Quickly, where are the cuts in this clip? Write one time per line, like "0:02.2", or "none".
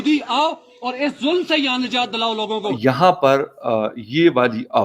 0:02.7